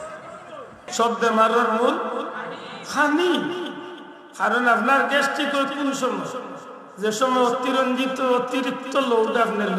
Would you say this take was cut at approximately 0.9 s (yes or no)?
yes